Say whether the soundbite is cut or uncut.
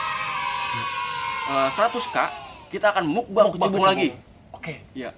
cut